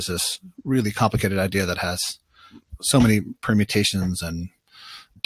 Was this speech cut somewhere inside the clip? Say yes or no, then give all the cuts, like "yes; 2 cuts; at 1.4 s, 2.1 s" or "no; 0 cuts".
no; 0 cuts